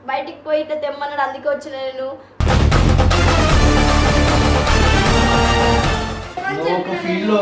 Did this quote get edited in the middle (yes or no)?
yes